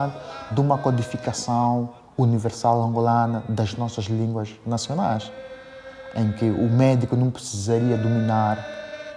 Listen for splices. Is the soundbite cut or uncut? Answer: uncut